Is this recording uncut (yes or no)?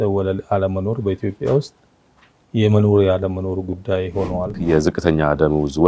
no